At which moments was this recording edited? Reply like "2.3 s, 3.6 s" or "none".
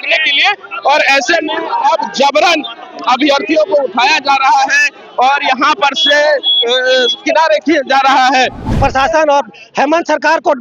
8.7 s